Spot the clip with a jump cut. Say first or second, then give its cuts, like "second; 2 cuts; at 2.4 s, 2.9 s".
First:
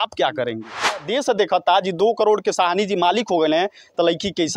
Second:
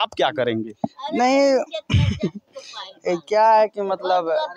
first; 1 cut; at 1.0 s